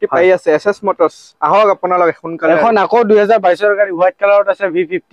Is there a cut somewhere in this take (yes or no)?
no